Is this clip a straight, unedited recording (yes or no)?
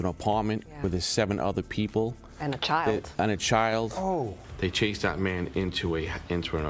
yes